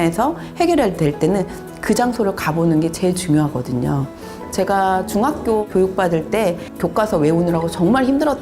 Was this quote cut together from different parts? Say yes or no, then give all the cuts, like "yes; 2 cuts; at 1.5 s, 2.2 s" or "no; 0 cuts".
yes; 2 cuts; at 4.4 s, 6.7 s